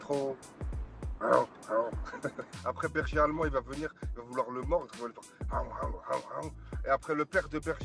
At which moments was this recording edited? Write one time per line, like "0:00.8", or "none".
0:02.5